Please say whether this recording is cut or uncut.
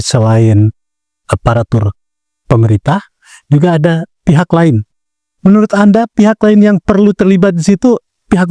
uncut